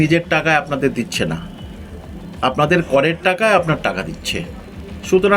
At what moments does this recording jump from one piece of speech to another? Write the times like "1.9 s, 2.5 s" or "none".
none